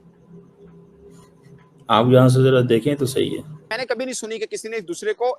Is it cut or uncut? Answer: cut